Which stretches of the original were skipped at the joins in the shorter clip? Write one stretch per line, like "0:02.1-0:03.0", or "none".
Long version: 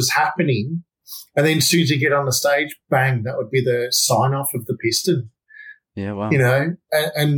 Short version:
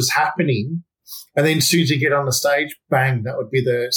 none